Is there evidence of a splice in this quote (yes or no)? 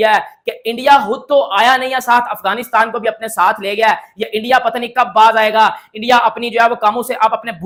no